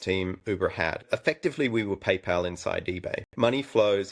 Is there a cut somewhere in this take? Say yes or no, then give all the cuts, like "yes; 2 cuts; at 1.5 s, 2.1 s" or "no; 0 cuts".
yes; 2 cuts; at 1.0 s, 3.3 s